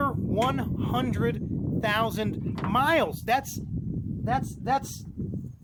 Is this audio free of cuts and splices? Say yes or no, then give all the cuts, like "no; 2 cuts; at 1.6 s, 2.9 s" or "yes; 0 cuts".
yes; 0 cuts